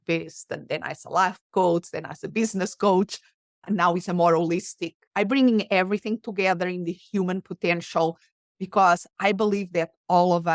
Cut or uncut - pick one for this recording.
cut